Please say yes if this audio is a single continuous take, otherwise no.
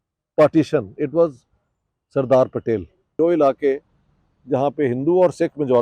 no